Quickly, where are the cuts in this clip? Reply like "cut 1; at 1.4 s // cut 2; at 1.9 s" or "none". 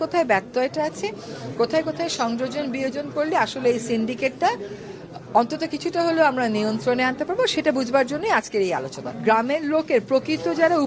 cut 1; at 9.0 s